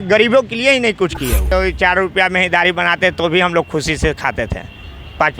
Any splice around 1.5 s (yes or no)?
yes